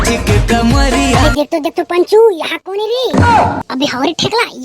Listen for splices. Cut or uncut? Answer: cut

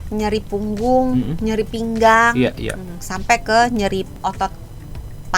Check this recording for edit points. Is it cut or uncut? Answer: cut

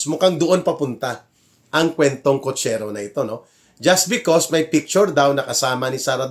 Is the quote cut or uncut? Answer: uncut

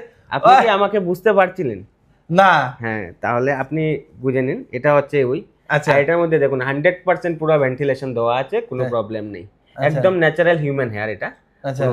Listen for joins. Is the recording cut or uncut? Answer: uncut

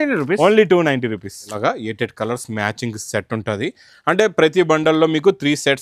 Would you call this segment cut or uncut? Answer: cut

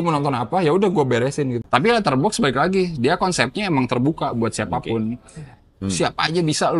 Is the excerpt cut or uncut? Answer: cut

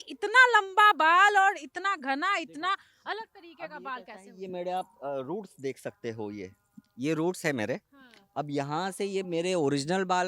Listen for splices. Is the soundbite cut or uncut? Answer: uncut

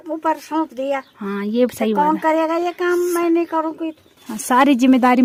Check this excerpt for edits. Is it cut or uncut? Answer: uncut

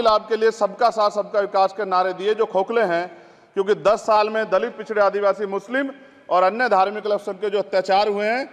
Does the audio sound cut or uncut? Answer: uncut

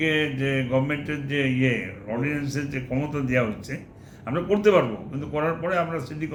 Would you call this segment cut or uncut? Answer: uncut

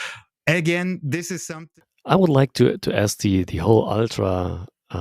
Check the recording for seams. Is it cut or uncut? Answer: cut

